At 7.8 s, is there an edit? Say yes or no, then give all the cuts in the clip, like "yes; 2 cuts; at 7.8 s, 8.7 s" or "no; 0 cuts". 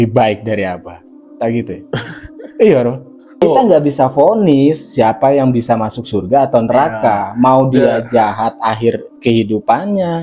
no; 1 cut; at 3.4 s